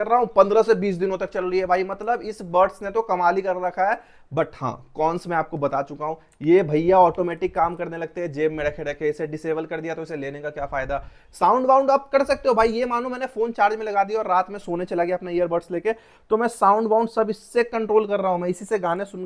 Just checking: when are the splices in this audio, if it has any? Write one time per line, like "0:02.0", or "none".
none